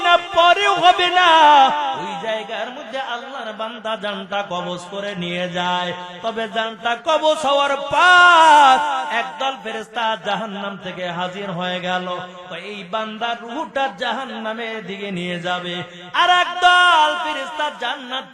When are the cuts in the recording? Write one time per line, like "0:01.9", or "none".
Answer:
0:02.1